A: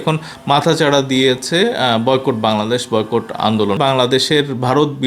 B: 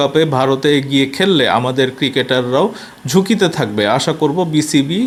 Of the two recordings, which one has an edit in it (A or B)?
A